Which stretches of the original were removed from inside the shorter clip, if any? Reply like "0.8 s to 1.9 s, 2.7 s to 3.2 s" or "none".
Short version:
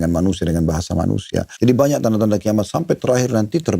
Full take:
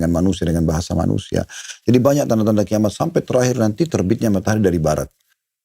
1.5 s to 1.7 s